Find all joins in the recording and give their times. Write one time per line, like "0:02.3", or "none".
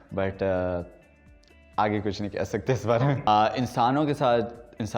0:03.3